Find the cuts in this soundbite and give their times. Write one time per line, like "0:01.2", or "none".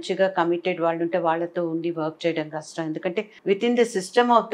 0:03.3